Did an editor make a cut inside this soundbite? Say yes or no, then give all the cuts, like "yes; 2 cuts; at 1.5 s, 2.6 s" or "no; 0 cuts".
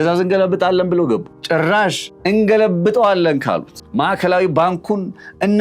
yes; 3 cuts; at 1.3 s, 2.1 s, 3.8 s